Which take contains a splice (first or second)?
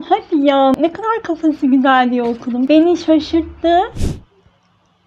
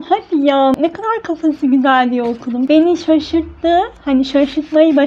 first